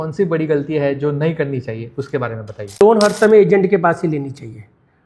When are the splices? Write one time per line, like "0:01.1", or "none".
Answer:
0:02.8